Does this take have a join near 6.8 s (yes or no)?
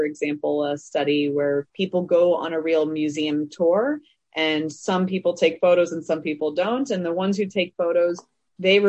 no